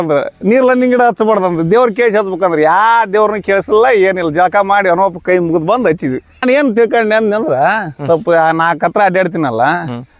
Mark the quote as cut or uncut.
cut